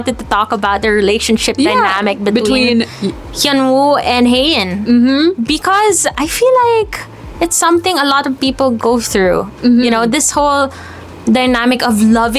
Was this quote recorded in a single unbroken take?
yes; 0 cuts

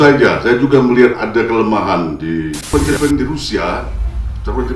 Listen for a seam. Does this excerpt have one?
yes; 1 cut; at 2.7 s

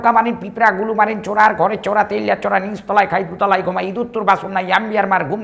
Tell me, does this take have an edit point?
no; 0 cuts

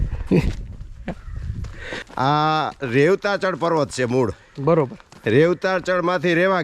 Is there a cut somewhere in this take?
yes; 1 cut; at 2.0 s

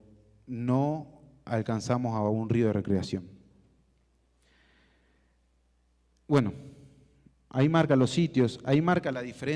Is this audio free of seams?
yes; 0 cuts

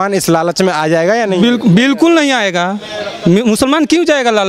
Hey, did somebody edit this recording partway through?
no; 0 cuts

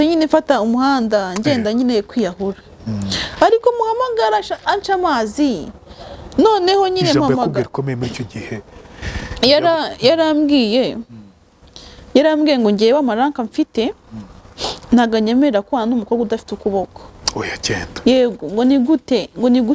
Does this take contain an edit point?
no; 0 cuts

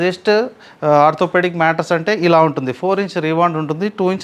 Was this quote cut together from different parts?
no; 0 cuts

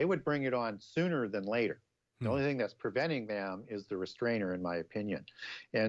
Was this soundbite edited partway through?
yes; 1 cut; at 1.7 s

